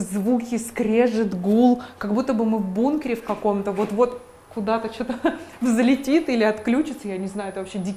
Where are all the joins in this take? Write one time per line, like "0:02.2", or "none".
none

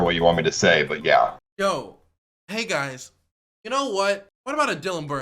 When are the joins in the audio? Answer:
0:01.3
0:04.3

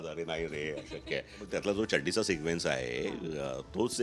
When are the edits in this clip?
0:01.4

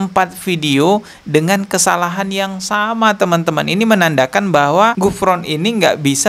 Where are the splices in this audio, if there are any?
0:05.0

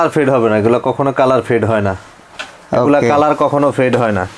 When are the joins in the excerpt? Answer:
none

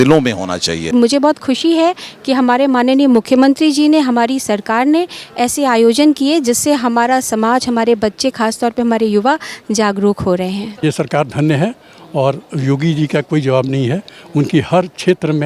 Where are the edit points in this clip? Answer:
0:00.9
0:10.8

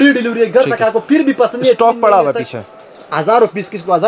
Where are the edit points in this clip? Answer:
none

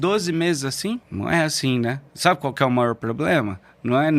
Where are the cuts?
0:01.1
0:02.1

